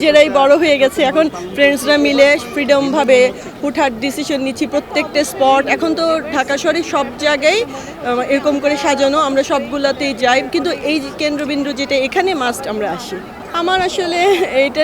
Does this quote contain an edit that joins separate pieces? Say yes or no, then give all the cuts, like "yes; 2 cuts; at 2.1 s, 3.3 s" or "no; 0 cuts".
no; 0 cuts